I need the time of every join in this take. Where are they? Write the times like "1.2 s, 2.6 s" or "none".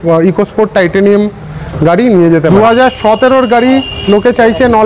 2.5 s